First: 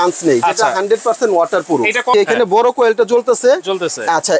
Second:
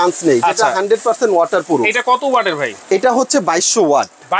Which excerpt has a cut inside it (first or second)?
first